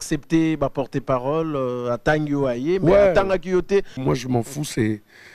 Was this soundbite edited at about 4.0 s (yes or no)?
yes